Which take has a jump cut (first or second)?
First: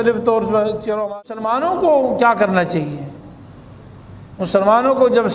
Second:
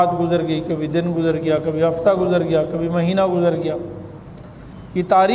first